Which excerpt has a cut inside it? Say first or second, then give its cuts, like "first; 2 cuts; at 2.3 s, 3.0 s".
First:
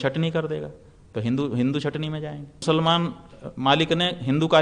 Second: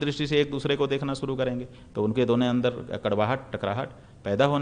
first; 1 cut; at 2.6 s